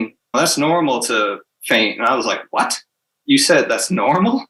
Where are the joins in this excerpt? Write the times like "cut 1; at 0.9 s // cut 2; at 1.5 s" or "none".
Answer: none